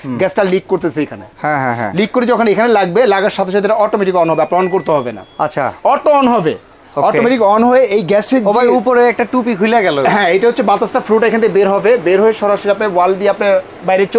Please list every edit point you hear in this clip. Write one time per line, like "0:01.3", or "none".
none